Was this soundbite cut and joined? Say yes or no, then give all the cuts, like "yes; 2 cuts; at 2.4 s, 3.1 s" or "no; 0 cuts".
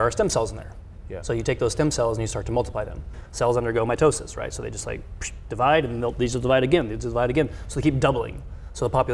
yes; 1 cut; at 3.2 s